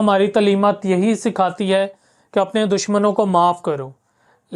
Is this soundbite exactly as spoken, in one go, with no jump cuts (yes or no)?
yes